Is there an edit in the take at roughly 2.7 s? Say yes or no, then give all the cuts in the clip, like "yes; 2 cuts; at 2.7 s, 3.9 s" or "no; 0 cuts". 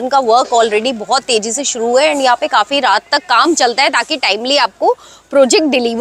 no; 0 cuts